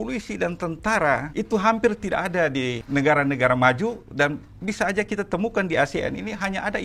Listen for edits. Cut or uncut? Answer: cut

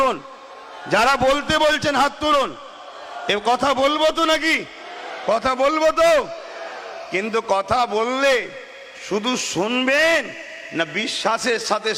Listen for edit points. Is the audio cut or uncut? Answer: uncut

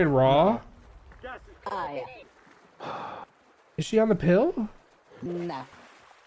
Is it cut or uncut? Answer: uncut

